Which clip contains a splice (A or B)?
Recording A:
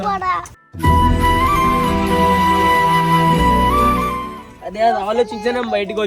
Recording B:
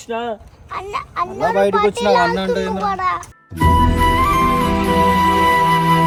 A